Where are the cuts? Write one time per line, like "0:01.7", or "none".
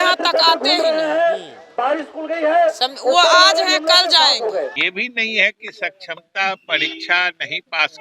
0:04.8